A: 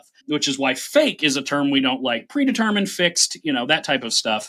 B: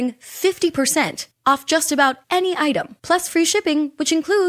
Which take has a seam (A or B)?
B